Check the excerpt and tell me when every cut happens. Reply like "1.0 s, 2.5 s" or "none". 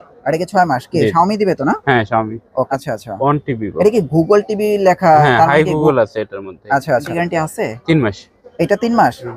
2.7 s, 7.1 s